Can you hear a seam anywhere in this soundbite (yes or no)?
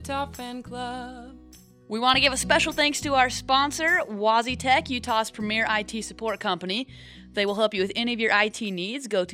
yes